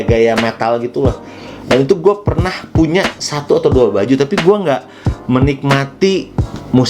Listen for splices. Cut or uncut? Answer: uncut